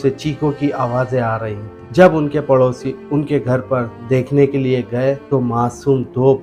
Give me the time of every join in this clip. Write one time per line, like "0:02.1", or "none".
none